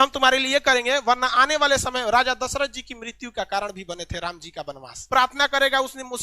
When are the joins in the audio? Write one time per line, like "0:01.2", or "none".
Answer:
0:04.9